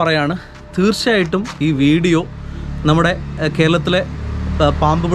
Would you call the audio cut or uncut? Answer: uncut